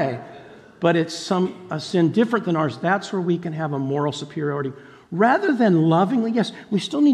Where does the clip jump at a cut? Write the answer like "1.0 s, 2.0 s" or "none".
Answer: none